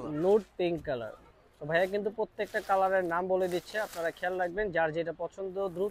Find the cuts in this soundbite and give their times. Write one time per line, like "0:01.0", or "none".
none